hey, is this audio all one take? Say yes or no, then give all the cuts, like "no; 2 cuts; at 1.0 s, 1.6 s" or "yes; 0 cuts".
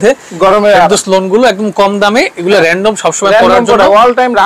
yes; 0 cuts